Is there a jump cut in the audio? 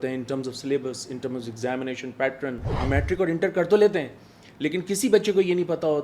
yes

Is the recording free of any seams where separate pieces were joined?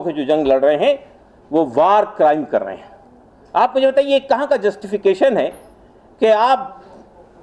yes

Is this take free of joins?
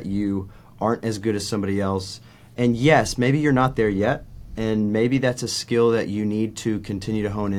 yes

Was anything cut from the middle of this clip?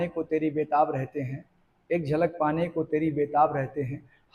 no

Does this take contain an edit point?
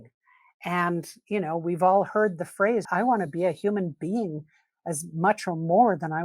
yes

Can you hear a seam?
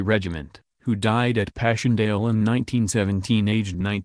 yes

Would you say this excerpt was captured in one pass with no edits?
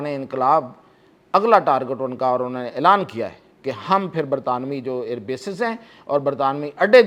yes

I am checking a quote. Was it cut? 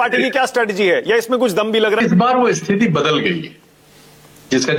no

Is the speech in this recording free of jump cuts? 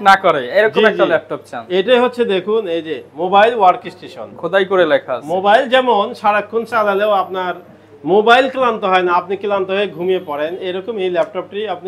yes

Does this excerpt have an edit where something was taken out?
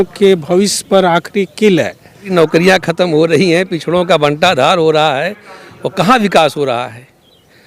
yes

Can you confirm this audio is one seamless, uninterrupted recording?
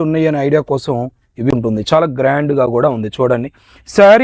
no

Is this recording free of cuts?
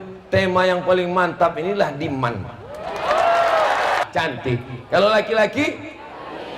no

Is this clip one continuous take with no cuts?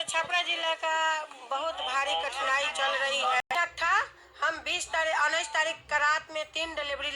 no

